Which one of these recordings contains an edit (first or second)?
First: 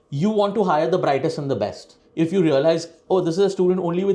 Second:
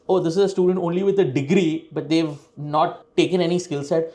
first